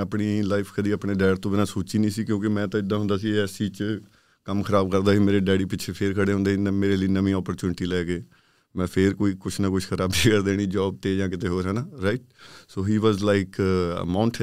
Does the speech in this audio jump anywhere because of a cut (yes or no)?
no